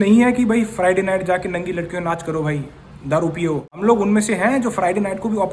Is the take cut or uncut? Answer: cut